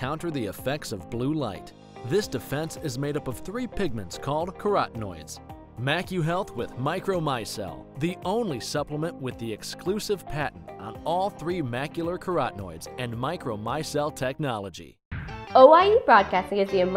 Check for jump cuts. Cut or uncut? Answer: cut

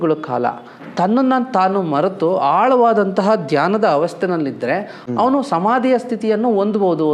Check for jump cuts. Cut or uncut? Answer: cut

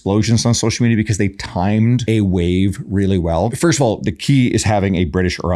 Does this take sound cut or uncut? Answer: cut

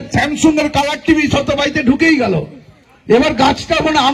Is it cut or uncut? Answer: uncut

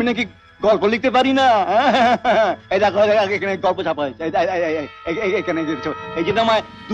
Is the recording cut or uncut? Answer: uncut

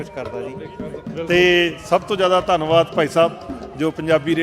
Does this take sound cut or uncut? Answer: cut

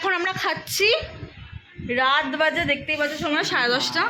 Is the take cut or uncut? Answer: uncut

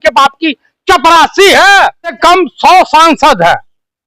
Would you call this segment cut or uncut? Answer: cut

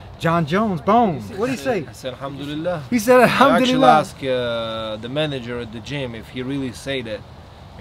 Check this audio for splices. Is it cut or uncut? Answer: cut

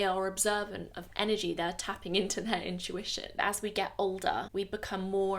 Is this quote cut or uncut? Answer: cut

